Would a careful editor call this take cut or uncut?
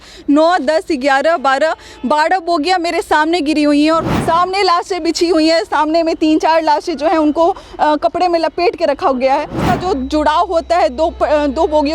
cut